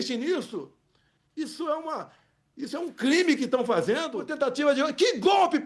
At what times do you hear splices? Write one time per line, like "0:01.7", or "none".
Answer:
0:04.2